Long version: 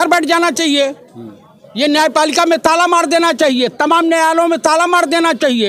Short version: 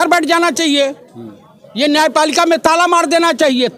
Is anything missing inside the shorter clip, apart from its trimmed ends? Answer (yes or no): no